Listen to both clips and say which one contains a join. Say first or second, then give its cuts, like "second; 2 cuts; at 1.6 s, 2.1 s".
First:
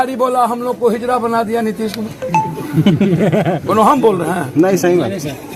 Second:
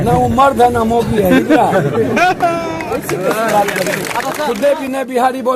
second; 1 cut; at 4.3 s